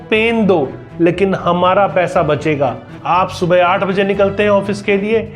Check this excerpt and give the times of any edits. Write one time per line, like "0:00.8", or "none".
0:02.9